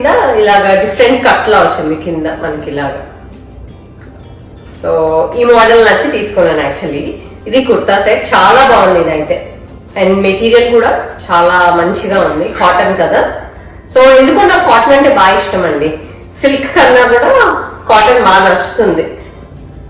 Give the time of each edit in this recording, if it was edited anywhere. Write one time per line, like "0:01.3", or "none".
none